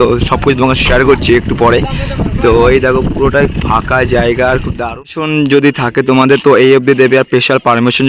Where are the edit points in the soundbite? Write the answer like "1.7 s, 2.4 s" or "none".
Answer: 4.8 s